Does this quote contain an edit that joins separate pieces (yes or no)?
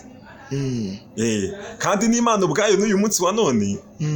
no